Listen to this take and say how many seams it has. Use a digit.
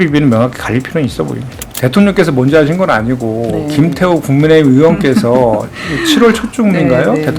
1